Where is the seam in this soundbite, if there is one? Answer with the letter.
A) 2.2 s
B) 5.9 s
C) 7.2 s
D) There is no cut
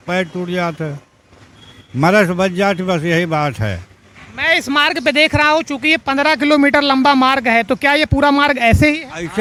D